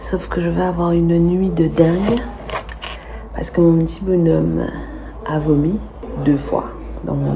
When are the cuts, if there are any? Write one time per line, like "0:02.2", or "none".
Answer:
0:06.0